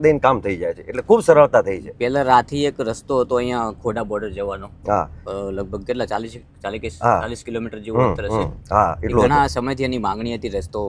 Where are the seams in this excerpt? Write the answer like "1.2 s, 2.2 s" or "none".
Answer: none